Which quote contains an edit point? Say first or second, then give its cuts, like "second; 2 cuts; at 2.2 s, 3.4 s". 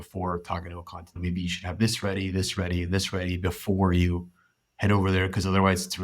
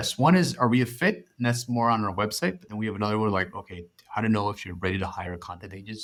first; 1 cut; at 1.2 s